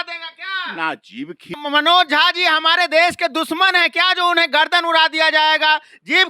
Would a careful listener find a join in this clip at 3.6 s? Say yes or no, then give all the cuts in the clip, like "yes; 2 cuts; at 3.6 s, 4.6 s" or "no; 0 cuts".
no; 1 cut; at 1.6 s